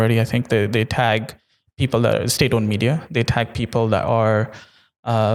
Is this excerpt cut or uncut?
uncut